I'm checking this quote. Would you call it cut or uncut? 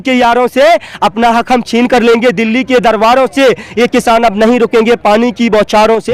uncut